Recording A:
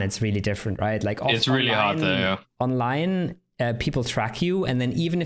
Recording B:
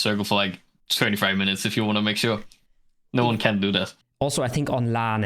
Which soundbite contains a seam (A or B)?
B